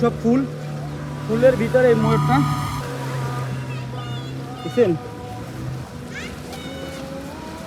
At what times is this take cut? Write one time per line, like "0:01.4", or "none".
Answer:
none